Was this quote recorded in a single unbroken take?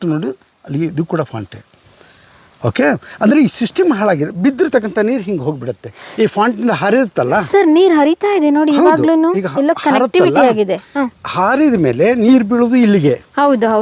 yes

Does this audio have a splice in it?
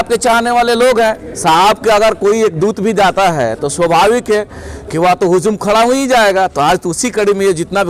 no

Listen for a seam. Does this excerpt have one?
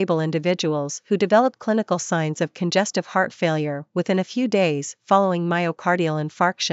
no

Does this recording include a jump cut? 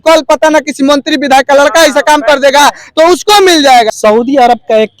yes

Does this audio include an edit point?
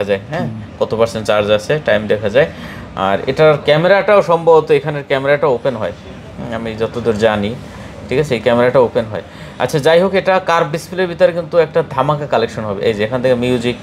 no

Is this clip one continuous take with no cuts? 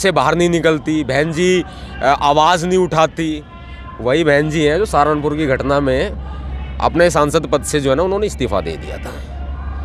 yes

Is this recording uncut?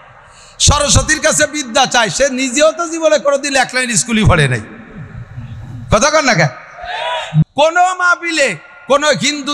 no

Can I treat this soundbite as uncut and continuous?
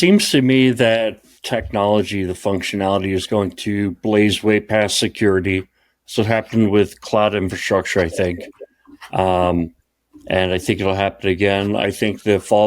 no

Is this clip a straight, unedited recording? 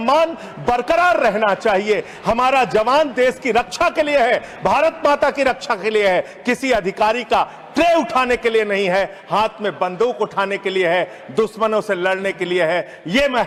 yes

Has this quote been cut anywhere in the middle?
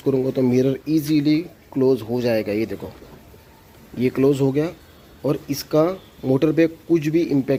no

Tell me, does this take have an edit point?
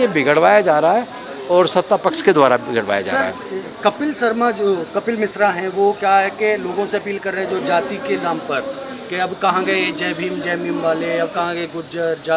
no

